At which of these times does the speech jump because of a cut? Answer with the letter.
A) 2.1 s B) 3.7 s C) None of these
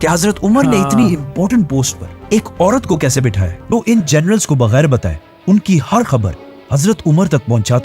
B